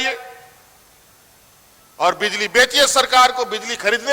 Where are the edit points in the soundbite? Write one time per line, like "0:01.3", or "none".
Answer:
none